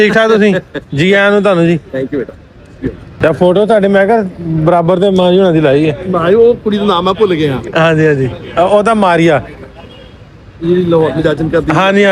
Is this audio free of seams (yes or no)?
yes